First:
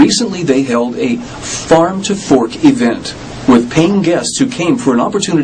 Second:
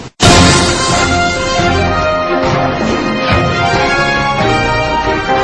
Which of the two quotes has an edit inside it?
first; 1 cut; at 2.5 s

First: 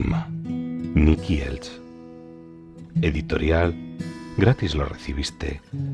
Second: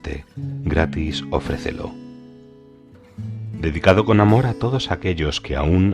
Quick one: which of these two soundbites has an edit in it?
second; 2 cuts; at 1.9 s, 3.6 s

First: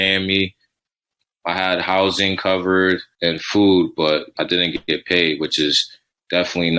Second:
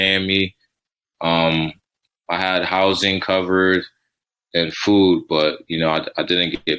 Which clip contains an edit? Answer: first; 3 cuts; at 1.0 s, 3.1 s, 4.3 s

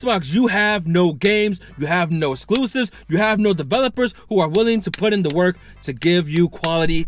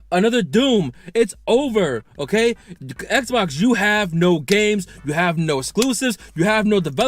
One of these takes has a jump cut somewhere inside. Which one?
second; 1 cut; at 1.0 s

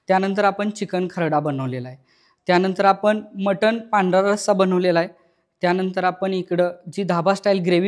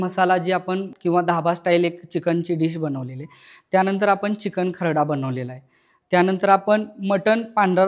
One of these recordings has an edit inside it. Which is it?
second; 1 cut; at 0.9 s

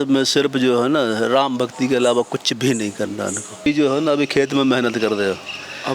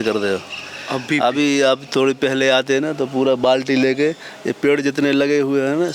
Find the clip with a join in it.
first; 1 cut; at 3.7 s

